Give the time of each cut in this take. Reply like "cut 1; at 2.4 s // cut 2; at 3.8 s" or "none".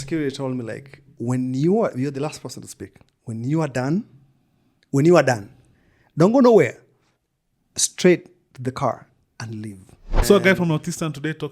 cut 1; at 10.2 s